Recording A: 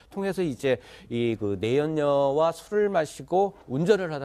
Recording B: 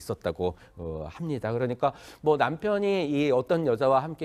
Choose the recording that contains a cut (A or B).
A